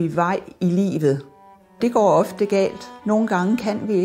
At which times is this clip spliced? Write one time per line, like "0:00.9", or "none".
0:01.8